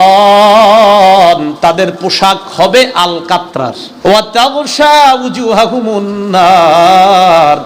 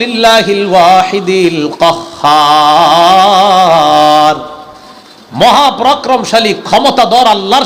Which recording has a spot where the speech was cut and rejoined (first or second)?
first